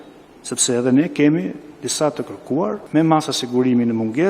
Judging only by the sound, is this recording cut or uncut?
cut